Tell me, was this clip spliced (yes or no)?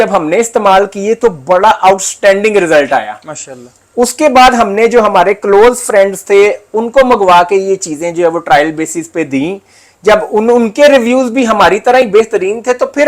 no